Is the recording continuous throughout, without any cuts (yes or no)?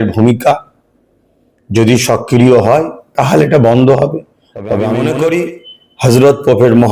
no